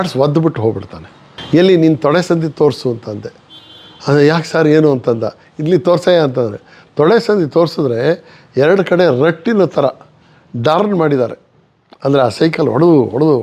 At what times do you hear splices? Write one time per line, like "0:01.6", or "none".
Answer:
0:01.4